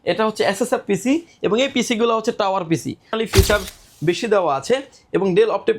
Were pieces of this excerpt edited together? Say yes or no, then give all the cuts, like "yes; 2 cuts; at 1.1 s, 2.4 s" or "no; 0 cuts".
yes; 1 cut; at 3.1 s